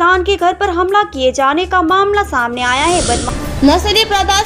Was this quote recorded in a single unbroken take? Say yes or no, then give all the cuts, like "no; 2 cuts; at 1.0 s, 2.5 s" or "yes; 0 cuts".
no; 1 cut; at 3.2 s